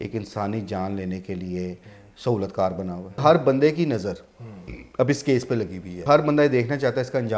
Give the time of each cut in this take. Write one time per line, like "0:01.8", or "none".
0:03.2
0:06.0